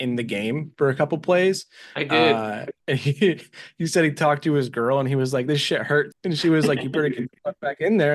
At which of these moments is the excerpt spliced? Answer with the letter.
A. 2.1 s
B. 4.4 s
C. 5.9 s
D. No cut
D